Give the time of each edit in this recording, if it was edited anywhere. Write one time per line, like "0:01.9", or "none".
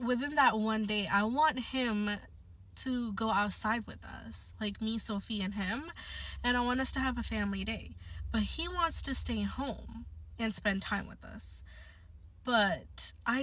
0:08.7